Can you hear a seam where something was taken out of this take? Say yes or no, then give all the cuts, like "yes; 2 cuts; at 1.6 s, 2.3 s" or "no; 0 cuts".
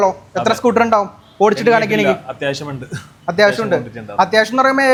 no; 0 cuts